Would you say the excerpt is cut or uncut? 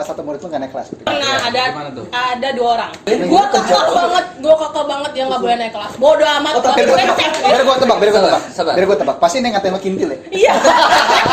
cut